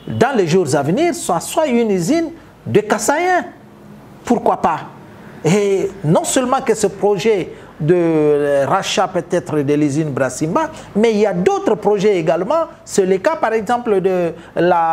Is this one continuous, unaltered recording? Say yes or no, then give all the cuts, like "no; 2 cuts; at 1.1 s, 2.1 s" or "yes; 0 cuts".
yes; 0 cuts